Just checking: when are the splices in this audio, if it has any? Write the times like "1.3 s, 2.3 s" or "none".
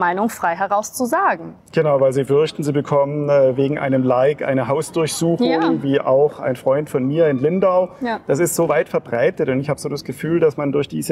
none

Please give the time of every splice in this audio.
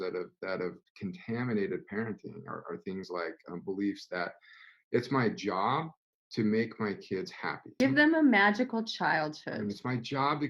7.8 s

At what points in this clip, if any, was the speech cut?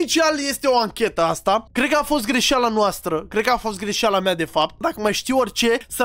1.6 s, 4.8 s

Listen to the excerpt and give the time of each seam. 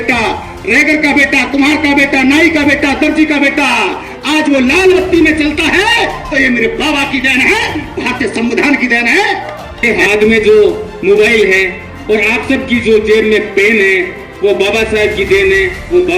9.8 s

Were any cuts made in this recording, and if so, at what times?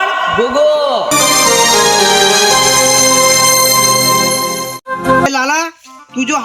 5.3 s

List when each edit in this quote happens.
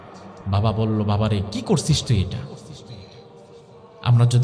none

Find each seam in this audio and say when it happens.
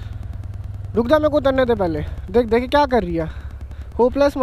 none

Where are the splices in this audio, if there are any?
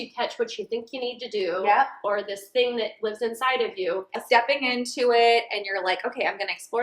4.2 s

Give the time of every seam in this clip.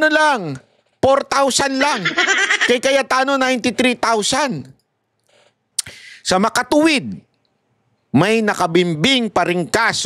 5.6 s

